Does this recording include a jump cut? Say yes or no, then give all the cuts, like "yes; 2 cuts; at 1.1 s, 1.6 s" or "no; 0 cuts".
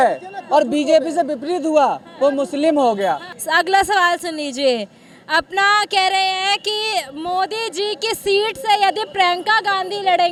no; 0 cuts